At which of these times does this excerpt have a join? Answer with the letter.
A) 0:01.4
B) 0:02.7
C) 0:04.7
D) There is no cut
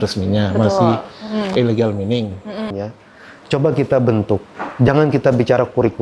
B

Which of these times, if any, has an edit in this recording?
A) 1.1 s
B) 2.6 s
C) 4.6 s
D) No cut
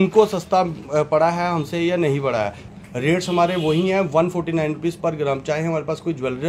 B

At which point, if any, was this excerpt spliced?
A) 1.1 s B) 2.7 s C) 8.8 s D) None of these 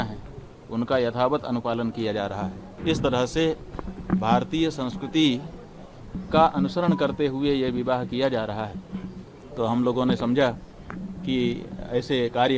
B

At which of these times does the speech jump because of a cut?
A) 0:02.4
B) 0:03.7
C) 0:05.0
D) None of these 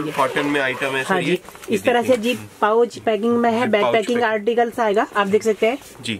D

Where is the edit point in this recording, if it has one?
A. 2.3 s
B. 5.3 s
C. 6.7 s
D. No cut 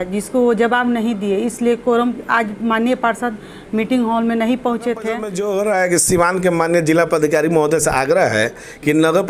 B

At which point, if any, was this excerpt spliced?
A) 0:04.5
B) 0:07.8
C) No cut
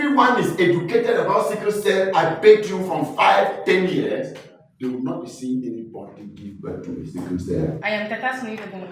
B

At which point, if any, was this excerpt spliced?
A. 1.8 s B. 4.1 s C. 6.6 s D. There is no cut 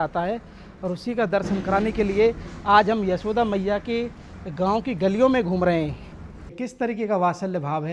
C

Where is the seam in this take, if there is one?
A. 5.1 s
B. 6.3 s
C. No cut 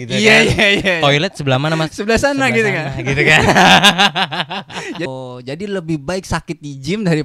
A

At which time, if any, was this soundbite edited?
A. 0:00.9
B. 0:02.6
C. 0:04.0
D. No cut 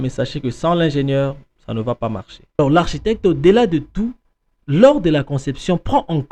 B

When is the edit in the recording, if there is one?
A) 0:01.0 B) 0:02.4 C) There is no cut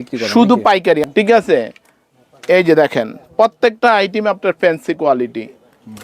A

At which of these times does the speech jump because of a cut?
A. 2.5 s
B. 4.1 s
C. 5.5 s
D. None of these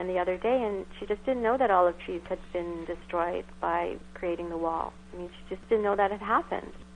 C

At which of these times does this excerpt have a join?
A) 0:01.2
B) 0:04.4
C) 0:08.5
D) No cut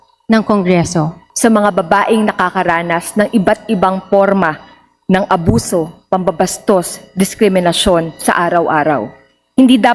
A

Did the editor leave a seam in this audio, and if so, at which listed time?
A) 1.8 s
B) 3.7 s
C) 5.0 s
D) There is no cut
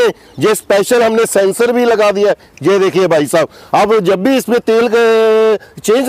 D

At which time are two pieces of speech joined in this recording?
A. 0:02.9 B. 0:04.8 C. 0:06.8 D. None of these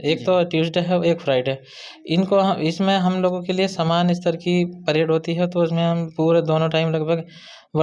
D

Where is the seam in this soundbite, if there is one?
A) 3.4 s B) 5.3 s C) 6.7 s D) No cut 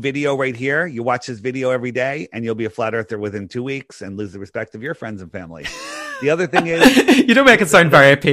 C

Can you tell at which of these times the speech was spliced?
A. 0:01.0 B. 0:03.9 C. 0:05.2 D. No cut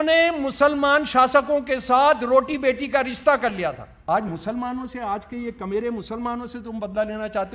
B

